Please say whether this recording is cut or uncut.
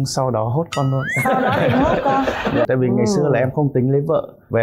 cut